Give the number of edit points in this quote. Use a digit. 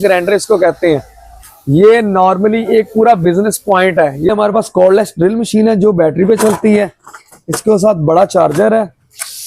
1